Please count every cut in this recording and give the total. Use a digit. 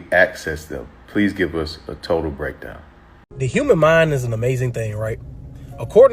1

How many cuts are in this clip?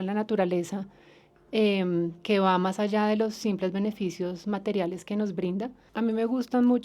1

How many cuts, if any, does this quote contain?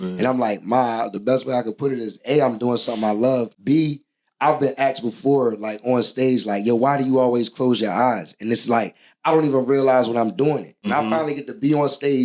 2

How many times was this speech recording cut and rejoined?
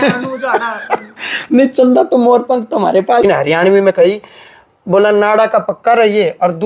1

